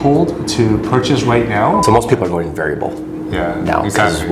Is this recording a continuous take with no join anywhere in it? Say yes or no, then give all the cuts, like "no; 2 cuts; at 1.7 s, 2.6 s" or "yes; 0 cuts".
no; 1 cut; at 1.8 s